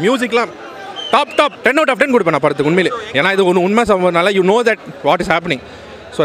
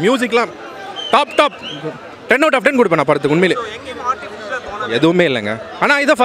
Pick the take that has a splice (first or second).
first